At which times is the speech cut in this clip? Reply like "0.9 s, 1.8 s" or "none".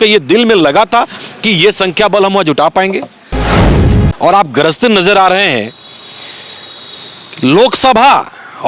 3.7 s